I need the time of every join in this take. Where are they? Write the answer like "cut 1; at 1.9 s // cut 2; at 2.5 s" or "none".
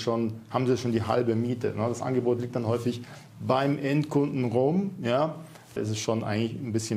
cut 1; at 5.8 s